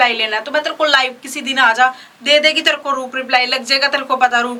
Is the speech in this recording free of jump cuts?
yes; 0 cuts

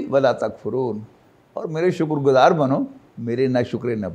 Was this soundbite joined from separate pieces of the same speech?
no; 0 cuts

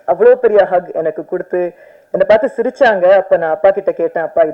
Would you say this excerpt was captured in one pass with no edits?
yes; 0 cuts

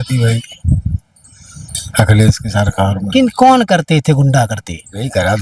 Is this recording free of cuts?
yes; 0 cuts

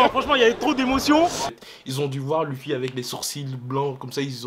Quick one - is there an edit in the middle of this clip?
yes; 1 cut; at 1.5 s

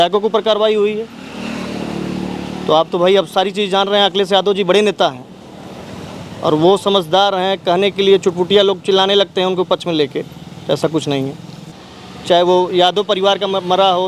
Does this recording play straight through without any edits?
no; 1 cut; at 11.7 s

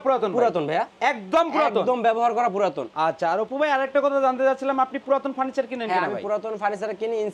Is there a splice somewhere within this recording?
no; 0 cuts

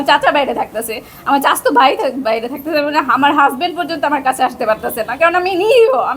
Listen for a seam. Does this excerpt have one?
no; 0 cuts

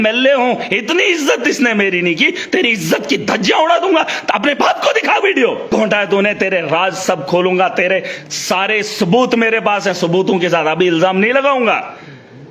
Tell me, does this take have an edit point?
yes; 1 cut; at 5.7 s

